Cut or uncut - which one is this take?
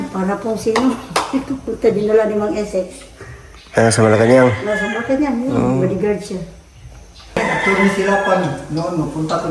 cut